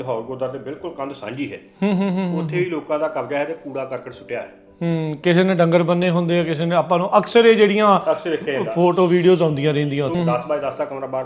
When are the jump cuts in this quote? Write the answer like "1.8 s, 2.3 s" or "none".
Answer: 10.1 s